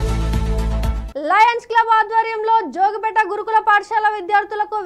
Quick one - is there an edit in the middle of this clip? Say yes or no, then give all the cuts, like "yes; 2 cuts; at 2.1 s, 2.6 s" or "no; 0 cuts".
yes; 1 cut; at 1.0 s